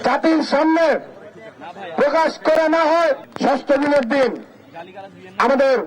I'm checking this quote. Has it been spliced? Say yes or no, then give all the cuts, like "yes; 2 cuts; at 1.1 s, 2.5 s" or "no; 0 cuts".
yes; 1 cut; at 3.3 s